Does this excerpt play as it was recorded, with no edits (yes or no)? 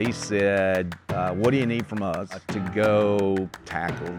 no